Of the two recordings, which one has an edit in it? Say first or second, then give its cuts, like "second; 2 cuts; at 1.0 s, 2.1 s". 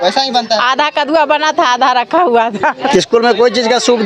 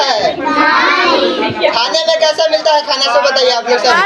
first; 1 cut; at 2.9 s